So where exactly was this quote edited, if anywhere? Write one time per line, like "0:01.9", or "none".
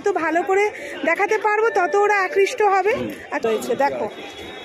0:03.4